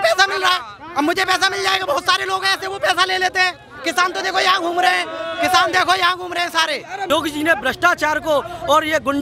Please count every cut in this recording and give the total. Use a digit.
1